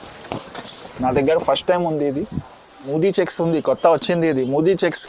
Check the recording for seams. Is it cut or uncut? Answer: cut